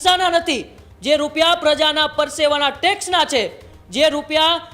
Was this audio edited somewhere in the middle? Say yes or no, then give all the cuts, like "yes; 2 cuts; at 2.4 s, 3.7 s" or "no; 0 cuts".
no; 0 cuts